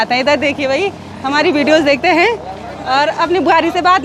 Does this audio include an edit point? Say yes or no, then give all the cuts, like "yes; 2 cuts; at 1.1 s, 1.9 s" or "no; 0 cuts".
no; 0 cuts